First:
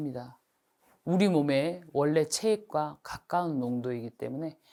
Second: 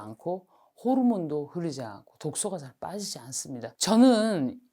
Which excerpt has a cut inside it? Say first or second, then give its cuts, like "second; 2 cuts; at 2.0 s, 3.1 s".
second; 1 cut; at 3.6 s